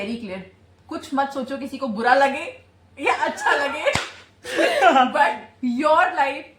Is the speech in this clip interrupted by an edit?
no; 0 cuts

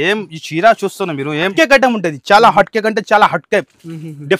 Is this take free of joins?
no; 1 cut; at 1.5 s

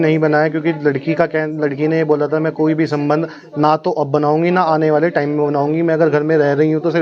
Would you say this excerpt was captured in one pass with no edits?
yes; 0 cuts

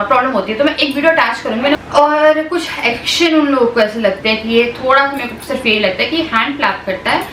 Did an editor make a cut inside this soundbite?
yes; 1 cut; at 1.7 s

